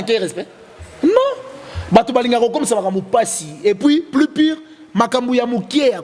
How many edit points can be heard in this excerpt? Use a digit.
0